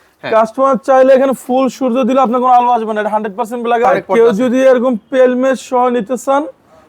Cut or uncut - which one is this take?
cut